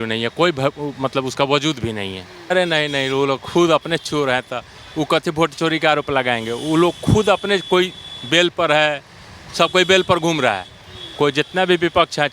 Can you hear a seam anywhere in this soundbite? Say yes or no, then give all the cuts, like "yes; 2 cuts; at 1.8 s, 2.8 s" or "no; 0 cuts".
yes; 1 cut; at 2.5 s